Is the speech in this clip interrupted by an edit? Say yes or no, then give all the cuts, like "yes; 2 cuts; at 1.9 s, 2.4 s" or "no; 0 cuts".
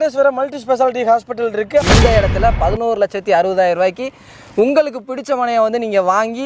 yes; 1 cut; at 1.8 s